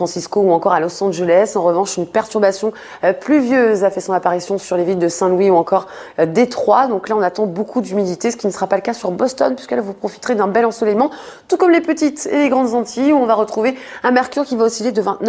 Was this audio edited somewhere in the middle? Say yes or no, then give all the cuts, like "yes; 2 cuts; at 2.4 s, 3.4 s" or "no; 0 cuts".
yes; 1 cut; at 1.0 s